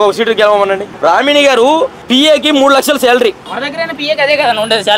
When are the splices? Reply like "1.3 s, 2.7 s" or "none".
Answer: 0.9 s, 2.0 s, 3.5 s